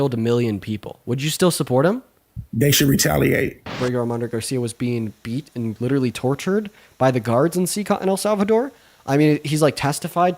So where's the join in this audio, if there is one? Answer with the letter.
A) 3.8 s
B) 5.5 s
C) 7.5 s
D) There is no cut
A